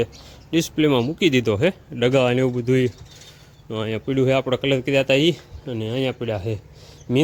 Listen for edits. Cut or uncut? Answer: uncut